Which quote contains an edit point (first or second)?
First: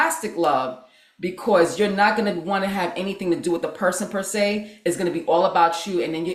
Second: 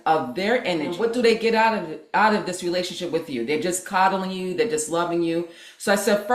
second